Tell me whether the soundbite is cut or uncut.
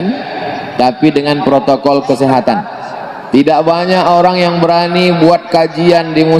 cut